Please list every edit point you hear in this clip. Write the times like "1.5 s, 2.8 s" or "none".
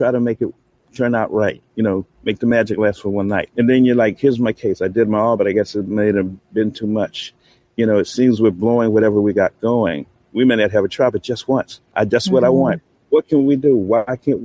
3.5 s, 11.8 s